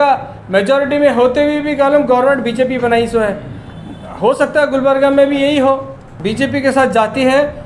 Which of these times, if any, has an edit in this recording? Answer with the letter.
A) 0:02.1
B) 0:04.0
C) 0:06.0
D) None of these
C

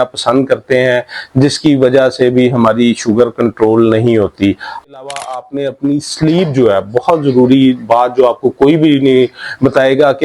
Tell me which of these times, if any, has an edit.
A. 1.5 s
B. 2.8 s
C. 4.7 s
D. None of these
C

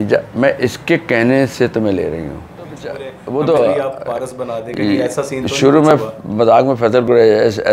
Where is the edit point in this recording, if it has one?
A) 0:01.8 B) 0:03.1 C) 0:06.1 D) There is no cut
B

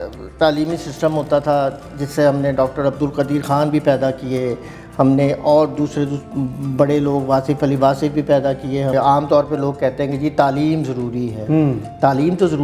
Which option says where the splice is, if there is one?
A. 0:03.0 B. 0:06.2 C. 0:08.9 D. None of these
C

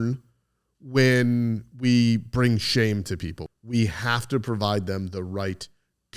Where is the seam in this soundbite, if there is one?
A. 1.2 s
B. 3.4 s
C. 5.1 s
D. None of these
B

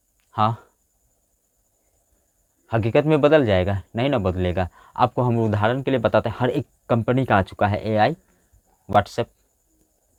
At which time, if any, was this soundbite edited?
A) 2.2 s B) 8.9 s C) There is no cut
C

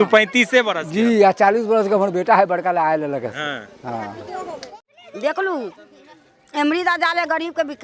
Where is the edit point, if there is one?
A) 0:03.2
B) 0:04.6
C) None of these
B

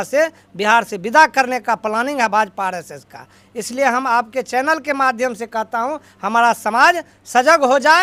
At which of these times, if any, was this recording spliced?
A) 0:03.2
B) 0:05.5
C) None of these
C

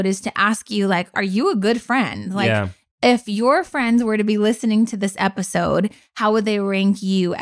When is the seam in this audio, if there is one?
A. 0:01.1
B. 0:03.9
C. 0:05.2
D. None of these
A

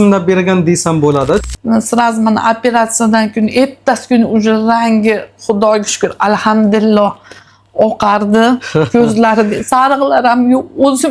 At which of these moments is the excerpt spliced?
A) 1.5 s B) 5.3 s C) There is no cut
A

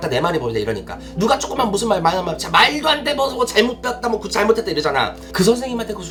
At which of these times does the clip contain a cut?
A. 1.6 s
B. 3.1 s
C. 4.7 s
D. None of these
D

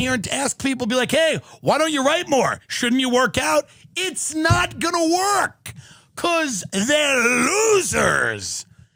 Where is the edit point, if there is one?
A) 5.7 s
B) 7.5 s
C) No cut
C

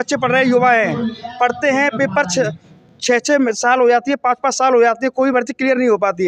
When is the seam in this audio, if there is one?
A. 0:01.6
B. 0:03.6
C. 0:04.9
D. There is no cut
D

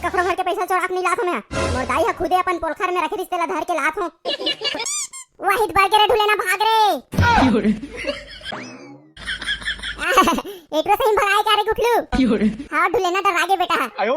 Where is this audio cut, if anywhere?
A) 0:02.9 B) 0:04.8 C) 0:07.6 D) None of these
B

